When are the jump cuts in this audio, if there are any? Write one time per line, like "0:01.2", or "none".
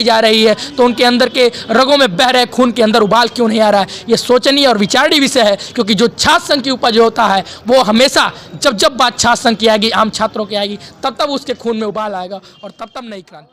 none

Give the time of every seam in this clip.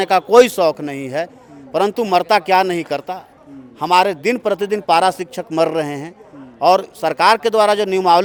none

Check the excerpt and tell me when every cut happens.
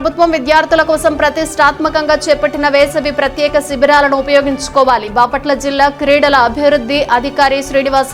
none

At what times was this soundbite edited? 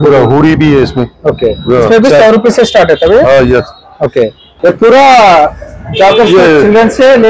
0:04.6

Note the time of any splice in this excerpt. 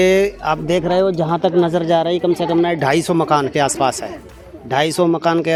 none

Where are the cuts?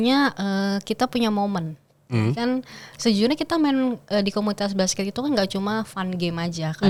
none

